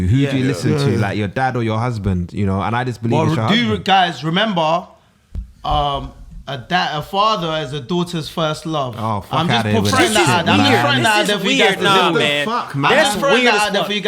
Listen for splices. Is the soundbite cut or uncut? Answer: uncut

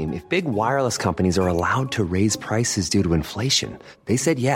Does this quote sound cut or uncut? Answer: uncut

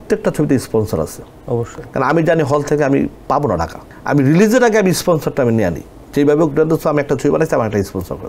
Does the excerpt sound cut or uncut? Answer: uncut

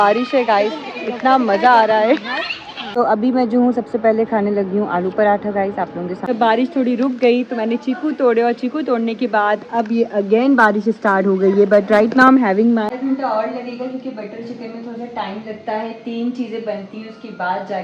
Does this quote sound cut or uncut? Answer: cut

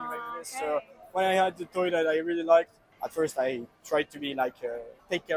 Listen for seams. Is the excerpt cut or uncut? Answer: uncut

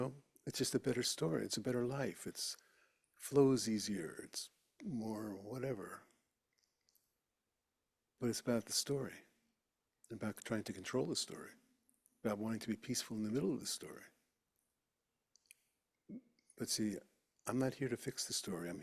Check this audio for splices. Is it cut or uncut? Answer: uncut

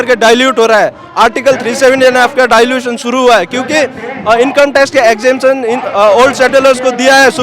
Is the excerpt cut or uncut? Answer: uncut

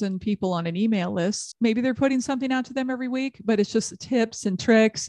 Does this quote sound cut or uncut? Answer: cut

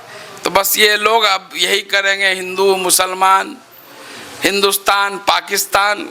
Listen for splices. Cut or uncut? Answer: uncut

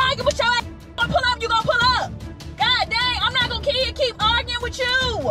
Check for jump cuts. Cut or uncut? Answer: uncut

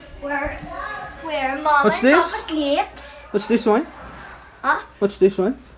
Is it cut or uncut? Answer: uncut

